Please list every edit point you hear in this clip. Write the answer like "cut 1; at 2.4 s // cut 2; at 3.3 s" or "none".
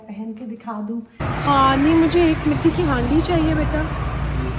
cut 1; at 1.2 s